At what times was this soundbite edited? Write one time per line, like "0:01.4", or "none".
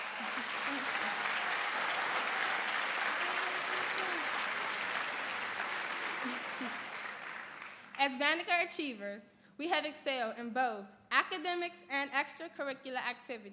0:06.4